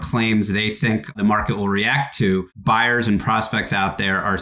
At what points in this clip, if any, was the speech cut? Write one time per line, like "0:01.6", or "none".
0:01.1
0:02.5